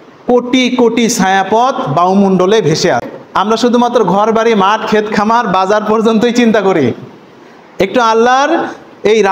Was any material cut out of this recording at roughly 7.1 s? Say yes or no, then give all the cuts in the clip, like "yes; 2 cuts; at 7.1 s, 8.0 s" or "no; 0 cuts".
no; 1 cut; at 3.2 s